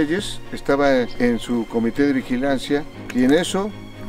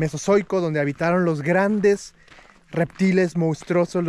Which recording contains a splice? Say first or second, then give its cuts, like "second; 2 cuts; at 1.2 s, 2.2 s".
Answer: first; 2 cuts; at 1.1 s, 3.0 s